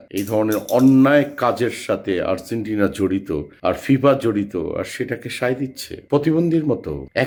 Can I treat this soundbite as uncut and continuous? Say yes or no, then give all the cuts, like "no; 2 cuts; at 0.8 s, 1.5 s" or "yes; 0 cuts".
yes; 0 cuts